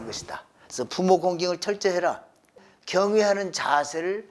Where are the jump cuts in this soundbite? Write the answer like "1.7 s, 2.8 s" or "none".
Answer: 2.5 s